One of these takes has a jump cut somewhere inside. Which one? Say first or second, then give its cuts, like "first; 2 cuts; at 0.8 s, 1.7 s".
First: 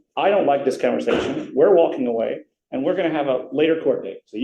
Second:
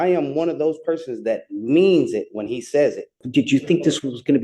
second; 1 cut; at 3.2 s